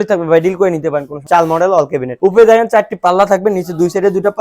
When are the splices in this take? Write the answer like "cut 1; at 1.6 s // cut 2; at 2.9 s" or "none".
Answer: cut 1; at 1.2 s // cut 2; at 2.1 s